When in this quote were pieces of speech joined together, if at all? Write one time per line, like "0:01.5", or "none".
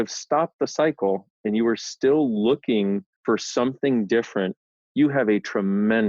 0:03.1
0:04.6

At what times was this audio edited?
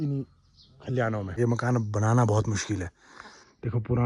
0:01.4

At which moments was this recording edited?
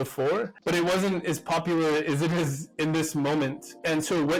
none

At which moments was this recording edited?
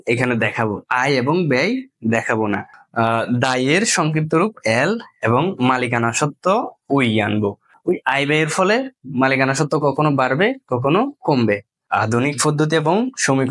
0:02.8
0:07.7
0:11.7

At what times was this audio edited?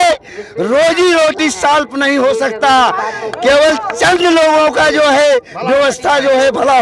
none

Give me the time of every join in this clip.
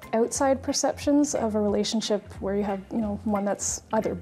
none

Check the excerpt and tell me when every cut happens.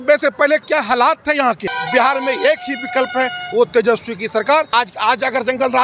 0:01.7
0:04.7

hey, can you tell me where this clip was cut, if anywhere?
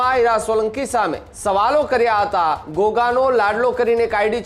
0:01.3
0:02.6

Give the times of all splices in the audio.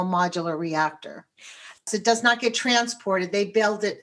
0:01.9

